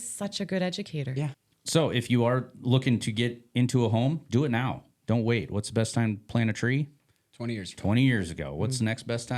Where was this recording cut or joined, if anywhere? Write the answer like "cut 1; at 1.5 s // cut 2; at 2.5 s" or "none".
cut 1; at 1.4 s